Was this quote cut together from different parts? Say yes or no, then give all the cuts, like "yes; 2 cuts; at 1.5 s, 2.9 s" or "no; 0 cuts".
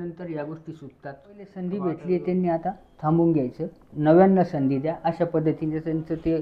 yes; 1 cut; at 1.6 s